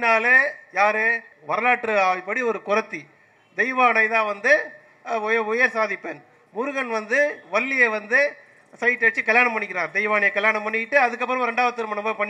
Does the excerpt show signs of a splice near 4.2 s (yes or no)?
no